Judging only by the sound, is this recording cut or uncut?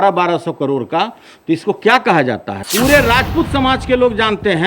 cut